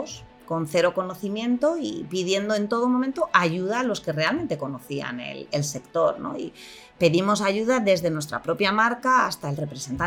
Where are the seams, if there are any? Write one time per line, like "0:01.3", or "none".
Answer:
none